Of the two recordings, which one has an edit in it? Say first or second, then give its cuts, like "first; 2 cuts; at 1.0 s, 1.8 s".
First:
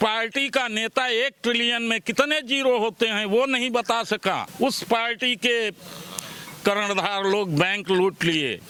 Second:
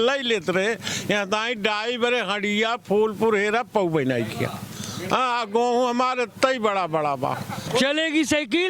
second; 1 cut; at 7.6 s